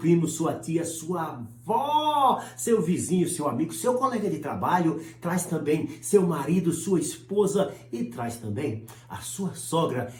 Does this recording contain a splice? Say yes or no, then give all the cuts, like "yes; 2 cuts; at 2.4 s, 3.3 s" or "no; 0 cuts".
no; 0 cuts